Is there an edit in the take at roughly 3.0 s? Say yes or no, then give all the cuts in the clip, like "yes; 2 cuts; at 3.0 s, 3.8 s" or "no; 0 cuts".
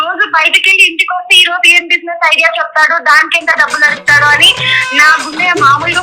no; 0 cuts